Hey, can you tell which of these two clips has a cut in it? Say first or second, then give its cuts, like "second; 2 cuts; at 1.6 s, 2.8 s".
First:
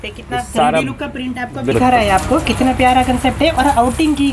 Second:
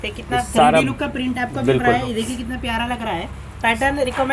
first; 1 cut; at 1.7 s